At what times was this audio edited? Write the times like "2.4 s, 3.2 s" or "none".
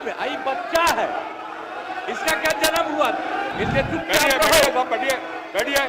3.5 s